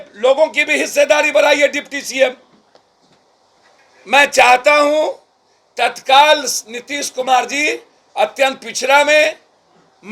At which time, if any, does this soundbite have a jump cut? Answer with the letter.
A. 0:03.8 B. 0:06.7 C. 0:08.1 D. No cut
A